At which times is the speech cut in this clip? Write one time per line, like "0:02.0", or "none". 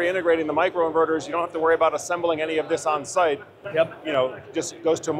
none